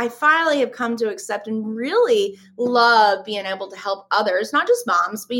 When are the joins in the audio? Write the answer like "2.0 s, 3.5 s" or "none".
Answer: none